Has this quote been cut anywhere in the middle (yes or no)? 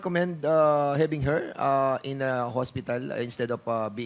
no